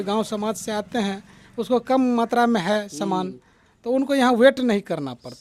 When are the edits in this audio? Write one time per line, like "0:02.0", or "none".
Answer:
none